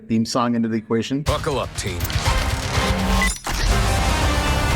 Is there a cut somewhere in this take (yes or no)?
yes